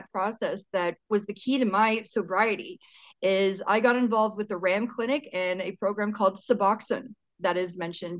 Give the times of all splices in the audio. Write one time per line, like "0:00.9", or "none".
0:01.0